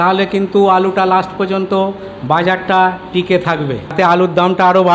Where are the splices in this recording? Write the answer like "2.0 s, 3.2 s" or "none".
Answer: 3.9 s